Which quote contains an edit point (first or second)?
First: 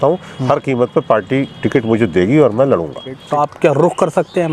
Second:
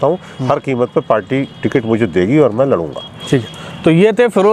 first